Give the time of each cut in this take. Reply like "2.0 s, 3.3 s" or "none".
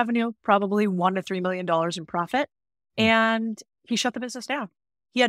3.6 s